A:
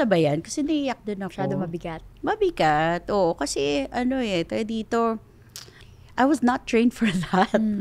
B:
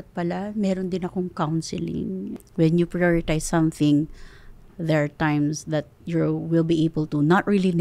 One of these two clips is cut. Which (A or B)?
B